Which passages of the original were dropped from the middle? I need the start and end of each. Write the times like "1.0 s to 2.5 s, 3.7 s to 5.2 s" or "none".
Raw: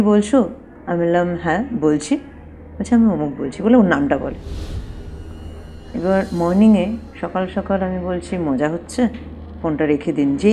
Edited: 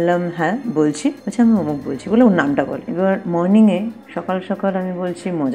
2.3 s to 2.8 s, 4.3 s to 5.9 s